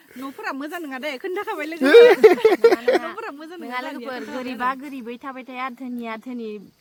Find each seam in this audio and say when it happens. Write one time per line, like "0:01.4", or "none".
none